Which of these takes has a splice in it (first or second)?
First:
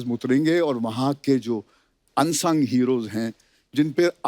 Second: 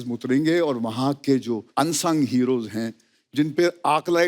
second